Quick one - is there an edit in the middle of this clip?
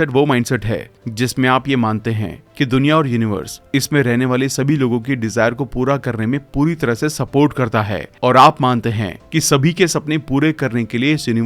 no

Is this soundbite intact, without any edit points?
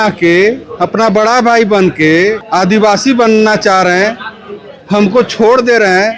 no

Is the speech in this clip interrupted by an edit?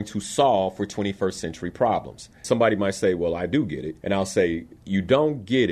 yes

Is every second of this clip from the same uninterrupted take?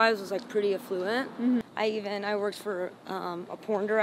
no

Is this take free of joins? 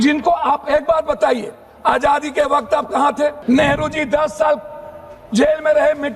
no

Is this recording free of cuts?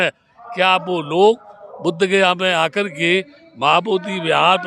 yes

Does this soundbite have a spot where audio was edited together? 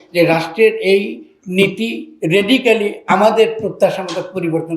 no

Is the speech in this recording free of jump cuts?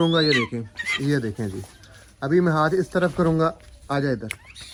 yes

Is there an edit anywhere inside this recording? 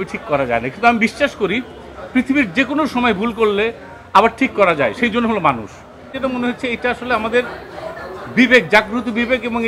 yes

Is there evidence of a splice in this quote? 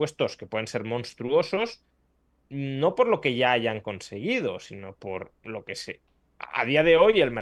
no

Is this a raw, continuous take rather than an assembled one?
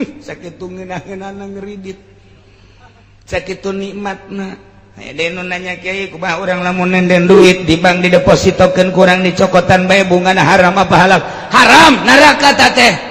yes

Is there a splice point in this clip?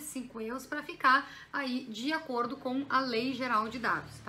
no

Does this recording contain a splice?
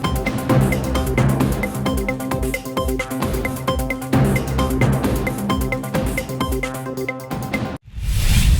yes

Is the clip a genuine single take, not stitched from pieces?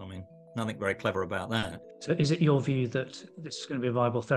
no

